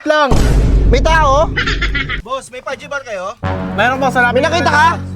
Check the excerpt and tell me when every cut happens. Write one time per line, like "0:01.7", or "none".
0:02.2